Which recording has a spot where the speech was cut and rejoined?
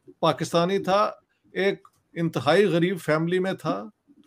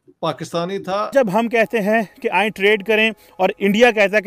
second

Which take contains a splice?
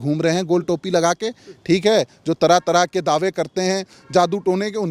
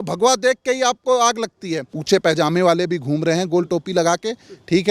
second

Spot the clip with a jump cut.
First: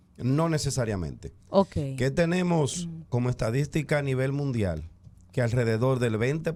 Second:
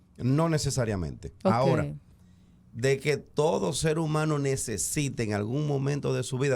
second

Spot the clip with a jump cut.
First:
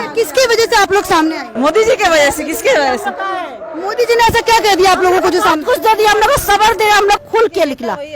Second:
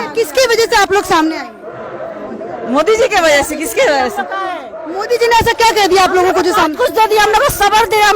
first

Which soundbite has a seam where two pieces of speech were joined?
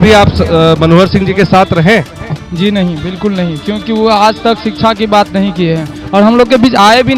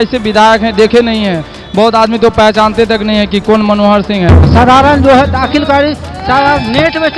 second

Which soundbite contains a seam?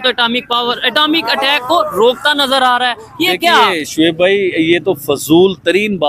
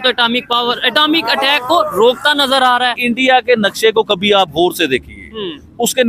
second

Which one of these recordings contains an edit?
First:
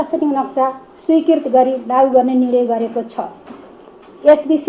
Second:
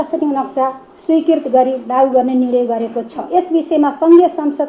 second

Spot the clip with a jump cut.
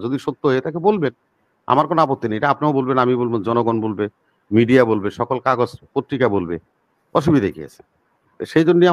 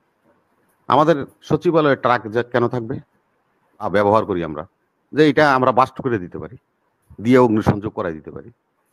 second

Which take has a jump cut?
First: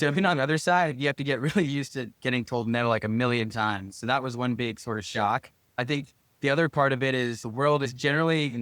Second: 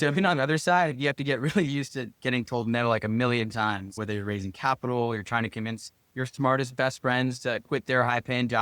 second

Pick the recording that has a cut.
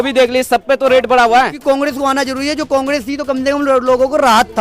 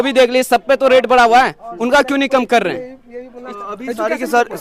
first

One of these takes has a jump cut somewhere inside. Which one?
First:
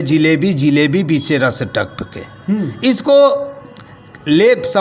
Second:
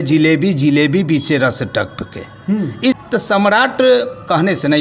second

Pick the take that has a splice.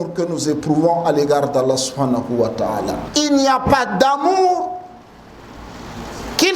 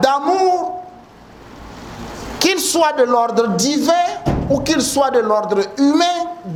first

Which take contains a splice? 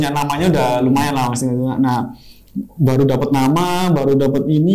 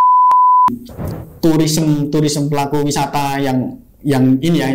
second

